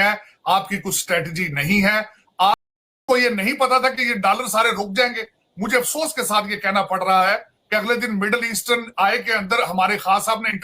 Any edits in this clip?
no; 0 cuts

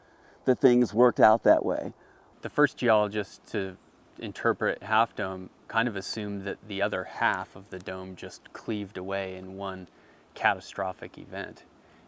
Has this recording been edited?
yes; 1 cut; at 3.4 s

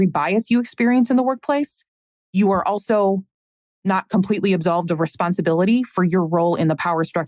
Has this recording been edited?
no; 0 cuts

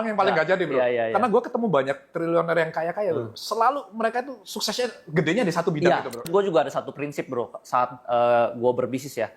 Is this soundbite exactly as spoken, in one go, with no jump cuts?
no; 1 cut; at 6.3 s

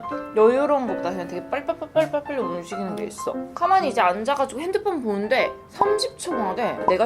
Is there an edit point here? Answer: yes; 1 cut; at 3.4 s

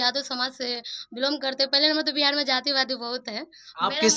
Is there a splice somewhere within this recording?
no; 0 cuts

